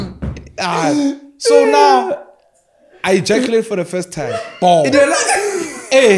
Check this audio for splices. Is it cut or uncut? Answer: uncut